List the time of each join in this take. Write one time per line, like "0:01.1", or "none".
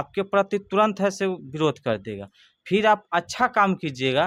none